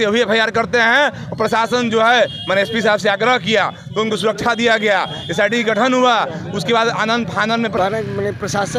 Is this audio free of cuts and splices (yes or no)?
no